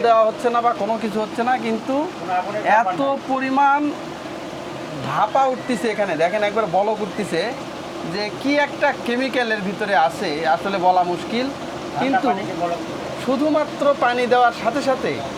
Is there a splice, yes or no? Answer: no